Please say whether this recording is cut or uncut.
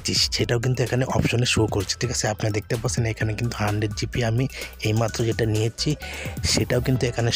uncut